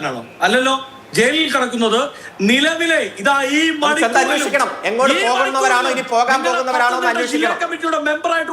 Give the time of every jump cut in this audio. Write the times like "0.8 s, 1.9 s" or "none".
none